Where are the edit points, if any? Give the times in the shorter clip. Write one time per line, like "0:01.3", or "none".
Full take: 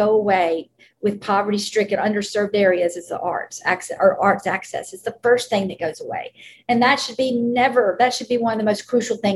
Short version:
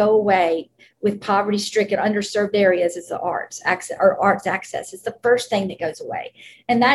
none